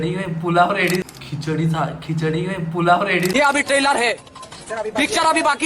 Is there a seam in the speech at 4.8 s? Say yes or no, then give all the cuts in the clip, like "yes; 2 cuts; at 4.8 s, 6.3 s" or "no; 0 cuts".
no; 2 cuts; at 1.0 s, 3.3 s